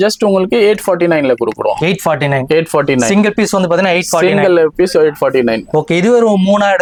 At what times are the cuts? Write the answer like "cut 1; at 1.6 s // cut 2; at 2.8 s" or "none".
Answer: none